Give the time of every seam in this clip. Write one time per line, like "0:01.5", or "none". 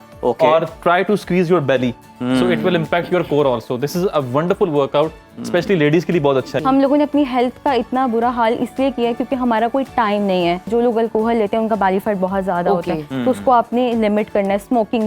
0:06.5
0:10.7